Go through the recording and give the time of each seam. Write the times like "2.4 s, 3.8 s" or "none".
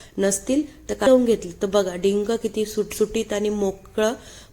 1.1 s